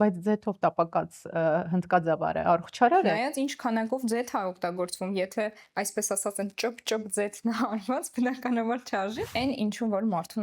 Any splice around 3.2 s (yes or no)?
no